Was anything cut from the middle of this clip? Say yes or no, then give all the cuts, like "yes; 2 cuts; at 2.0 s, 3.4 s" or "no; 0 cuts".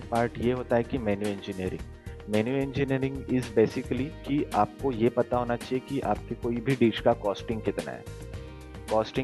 no; 0 cuts